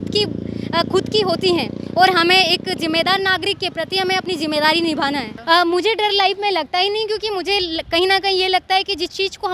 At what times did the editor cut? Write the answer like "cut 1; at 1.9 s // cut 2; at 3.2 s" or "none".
cut 1; at 5.3 s

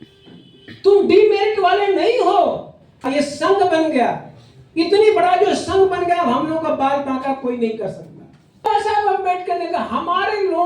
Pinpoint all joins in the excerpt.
cut 1; at 3.1 s // cut 2; at 8.6 s

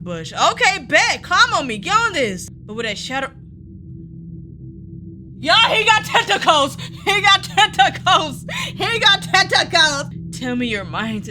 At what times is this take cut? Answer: cut 1; at 2.5 s // cut 2; at 10.1 s

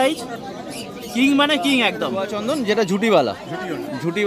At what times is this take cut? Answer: cut 1; at 2.4 s

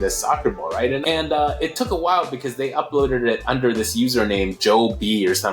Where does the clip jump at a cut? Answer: cut 1; at 1.0 s

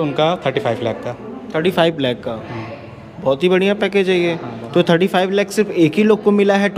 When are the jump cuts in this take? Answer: none

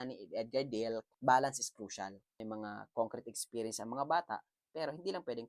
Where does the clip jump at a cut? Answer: cut 1; at 1.1 s // cut 2; at 2.2 s

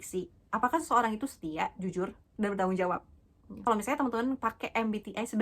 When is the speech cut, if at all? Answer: cut 1; at 3.7 s

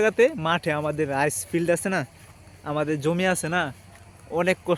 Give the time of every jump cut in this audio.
none

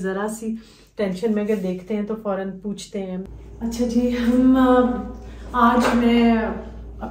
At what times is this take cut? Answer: cut 1; at 3.3 s

